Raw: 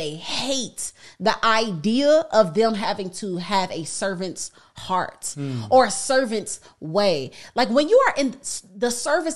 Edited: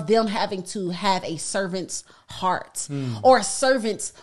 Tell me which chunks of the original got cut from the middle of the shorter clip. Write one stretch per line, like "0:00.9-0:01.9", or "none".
none